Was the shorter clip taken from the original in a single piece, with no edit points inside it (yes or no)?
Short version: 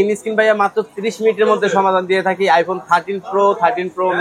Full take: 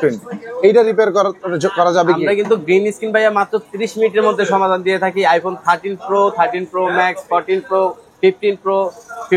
yes